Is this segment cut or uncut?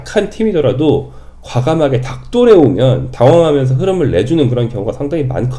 uncut